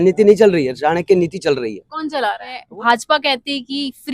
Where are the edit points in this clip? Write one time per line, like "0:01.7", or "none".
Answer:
0:02.6